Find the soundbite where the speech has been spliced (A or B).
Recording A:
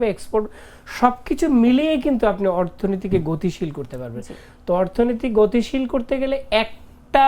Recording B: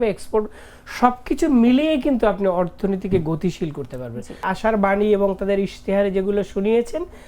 B